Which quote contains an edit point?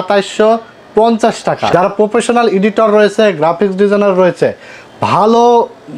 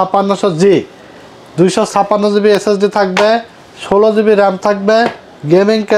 first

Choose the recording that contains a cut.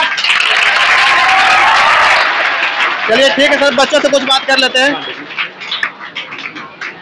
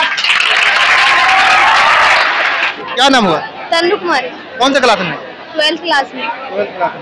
second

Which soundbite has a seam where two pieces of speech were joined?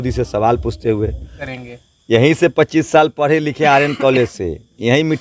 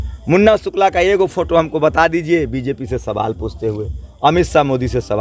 first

